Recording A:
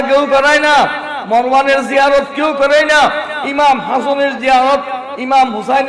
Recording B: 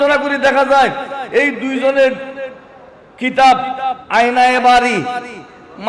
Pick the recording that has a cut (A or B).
B